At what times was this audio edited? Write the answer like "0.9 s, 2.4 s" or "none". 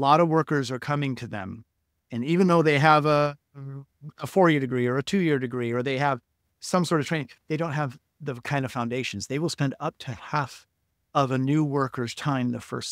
none